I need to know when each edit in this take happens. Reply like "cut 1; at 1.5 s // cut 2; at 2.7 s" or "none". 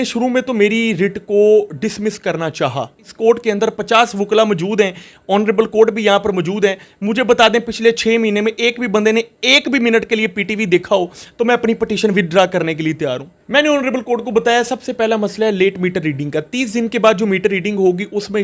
cut 1; at 3.1 s // cut 2; at 13.3 s